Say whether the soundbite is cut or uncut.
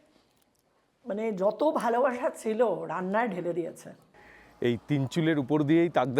cut